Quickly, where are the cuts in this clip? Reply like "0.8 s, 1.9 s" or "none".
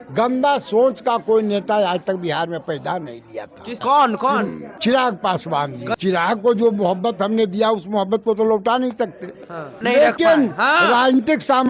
3.8 s, 4.6 s, 5.9 s, 9.8 s